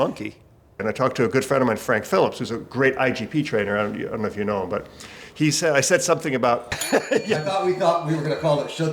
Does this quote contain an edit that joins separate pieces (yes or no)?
yes